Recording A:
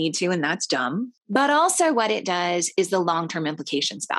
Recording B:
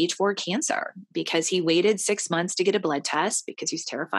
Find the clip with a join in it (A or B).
A